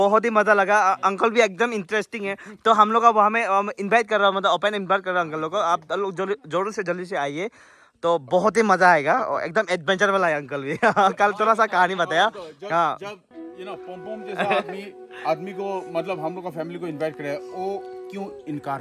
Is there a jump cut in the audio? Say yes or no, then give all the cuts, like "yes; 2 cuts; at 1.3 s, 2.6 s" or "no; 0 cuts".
no; 0 cuts